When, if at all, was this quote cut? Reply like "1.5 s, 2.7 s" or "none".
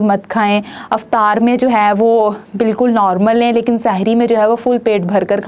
none